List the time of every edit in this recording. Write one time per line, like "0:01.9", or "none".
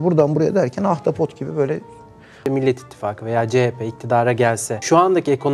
0:02.2